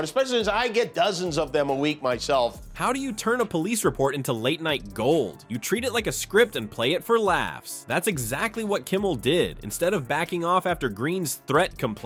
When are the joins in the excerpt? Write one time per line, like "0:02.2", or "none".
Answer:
none